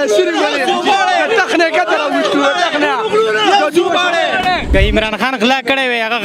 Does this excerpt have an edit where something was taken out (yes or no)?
no